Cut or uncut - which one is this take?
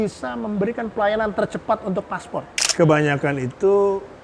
cut